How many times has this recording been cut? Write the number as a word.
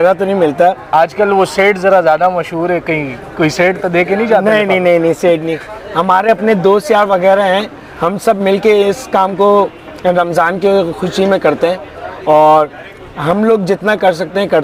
zero